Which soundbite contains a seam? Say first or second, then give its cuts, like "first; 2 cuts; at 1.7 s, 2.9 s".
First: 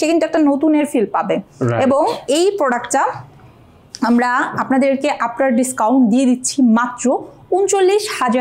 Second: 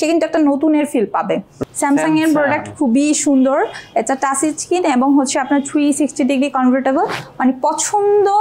second; 1 cut; at 1.6 s